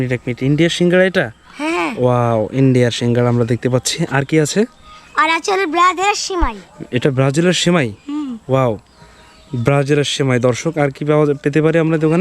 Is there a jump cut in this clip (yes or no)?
no